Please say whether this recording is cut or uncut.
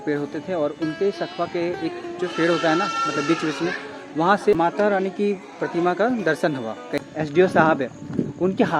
cut